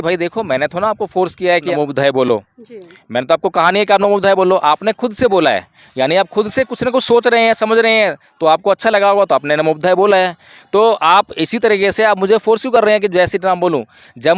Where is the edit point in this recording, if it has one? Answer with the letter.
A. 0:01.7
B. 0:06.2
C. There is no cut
A